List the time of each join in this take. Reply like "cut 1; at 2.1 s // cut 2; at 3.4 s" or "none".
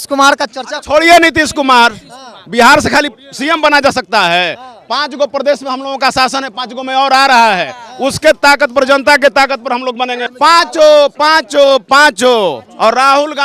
cut 1; at 10.3 s